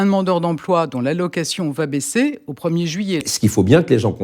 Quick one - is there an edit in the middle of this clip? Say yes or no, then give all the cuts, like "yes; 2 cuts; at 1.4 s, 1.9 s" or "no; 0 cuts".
yes; 1 cut; at 3.2 s